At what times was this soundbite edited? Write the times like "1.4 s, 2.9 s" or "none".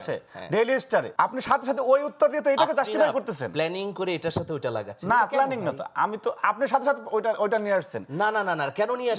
1.1 s